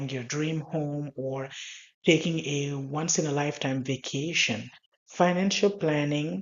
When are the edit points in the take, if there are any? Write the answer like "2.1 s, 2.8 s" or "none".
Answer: none